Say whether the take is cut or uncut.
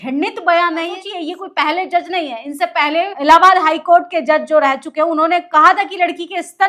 cut